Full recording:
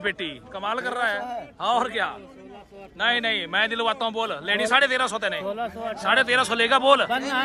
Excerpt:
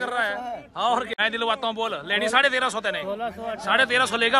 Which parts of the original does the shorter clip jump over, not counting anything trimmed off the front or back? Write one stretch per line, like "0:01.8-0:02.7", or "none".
0:02.0-0:03.5